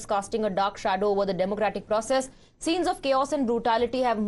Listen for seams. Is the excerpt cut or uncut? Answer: cut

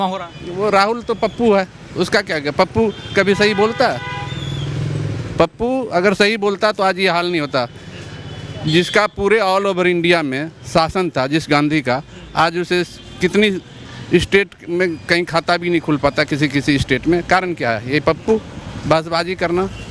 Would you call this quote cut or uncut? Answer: uncut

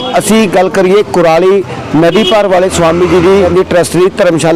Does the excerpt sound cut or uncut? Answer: cut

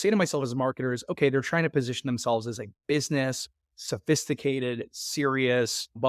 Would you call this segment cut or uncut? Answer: uncut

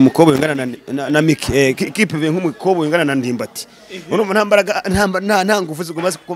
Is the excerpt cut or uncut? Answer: uncut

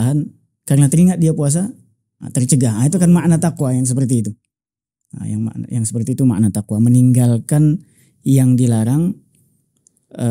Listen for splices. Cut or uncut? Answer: uncut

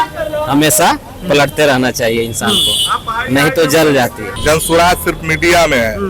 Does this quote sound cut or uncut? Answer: cut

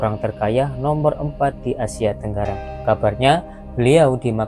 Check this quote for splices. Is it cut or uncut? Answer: cut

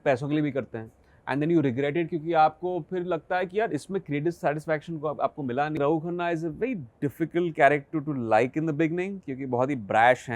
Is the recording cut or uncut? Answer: cut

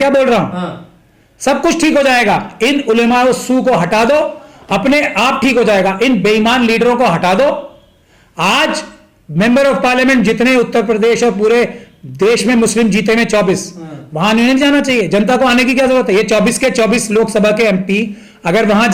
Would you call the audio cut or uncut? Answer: uncut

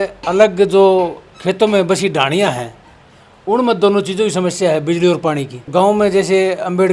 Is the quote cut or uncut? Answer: uncut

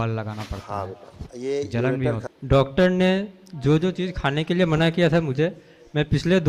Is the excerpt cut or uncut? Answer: cut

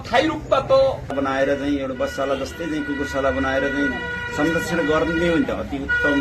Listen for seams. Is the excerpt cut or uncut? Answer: cut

